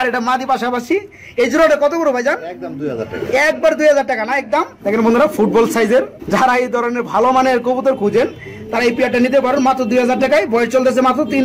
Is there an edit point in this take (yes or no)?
no